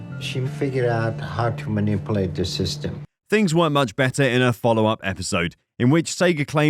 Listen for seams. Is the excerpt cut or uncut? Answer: uncut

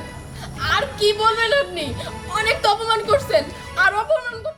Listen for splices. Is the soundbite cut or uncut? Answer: uncut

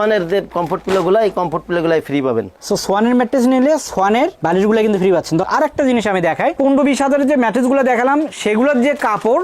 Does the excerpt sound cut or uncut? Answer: cut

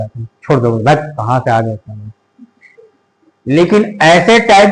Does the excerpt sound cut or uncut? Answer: uncut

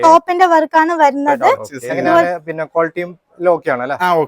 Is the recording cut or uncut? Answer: cut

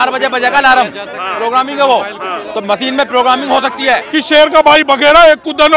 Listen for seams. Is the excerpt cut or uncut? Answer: cut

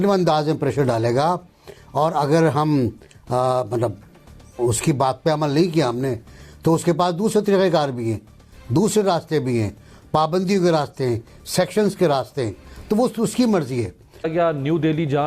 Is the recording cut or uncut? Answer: cut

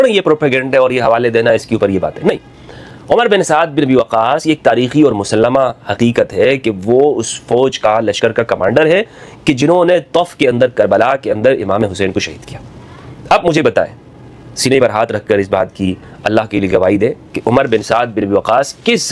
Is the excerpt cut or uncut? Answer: uncut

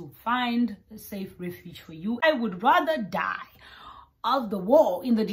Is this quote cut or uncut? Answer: cut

